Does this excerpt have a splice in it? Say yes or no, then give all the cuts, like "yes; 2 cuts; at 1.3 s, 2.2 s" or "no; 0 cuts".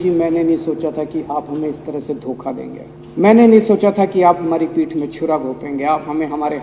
yes; 1 cut; at 2.9 s